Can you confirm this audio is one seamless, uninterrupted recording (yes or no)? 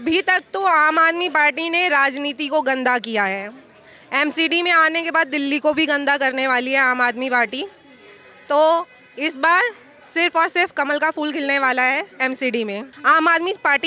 no